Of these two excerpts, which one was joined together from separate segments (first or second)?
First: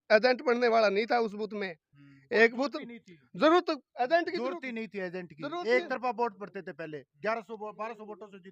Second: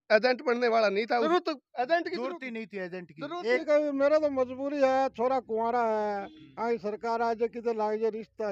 second